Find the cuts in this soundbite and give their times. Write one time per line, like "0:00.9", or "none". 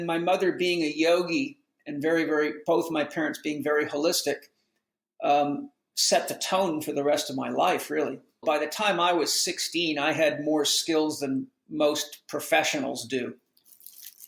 0:08.4